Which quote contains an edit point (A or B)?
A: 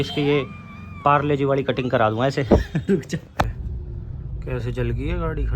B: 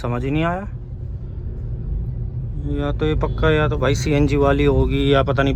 A